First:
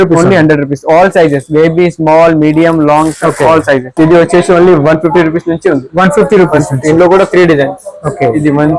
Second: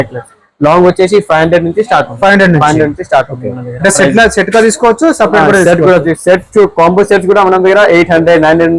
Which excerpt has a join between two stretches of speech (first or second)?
first